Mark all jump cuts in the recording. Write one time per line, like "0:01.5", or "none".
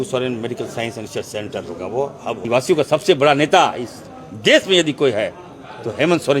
0:02.4

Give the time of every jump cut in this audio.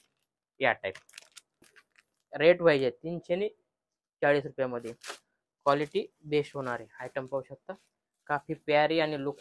0:01.8

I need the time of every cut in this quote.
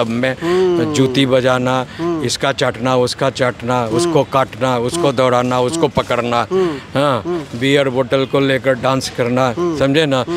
none

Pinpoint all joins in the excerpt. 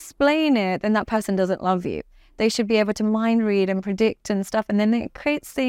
none

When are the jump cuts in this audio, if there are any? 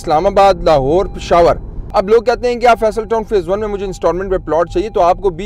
0:01.7

